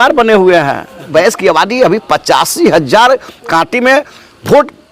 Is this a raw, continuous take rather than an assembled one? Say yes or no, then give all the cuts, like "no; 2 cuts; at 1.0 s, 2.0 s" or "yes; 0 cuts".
no; 1 cut; at 1.1 s